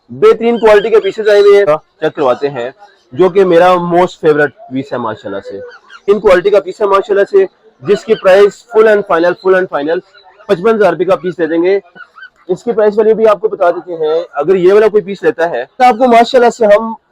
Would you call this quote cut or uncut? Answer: cut